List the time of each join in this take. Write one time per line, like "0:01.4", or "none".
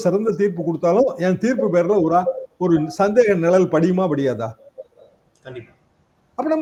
none